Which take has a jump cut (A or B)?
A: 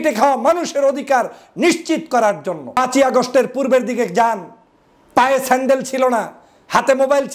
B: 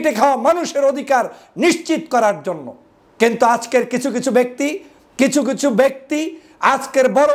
A